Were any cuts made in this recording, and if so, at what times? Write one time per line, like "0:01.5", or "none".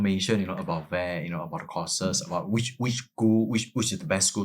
none